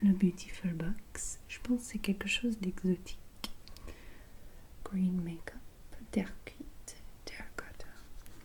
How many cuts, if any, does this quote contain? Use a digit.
1